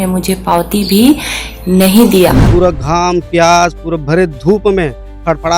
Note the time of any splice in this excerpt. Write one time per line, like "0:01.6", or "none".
0:02.4